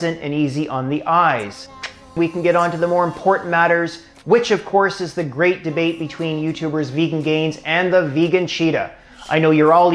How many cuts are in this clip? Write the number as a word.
one